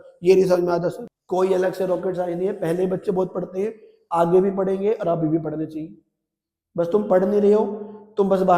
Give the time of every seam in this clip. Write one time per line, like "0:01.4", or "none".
0:01.1